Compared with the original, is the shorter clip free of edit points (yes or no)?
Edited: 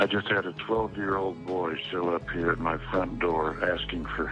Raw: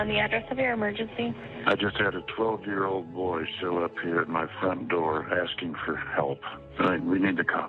yes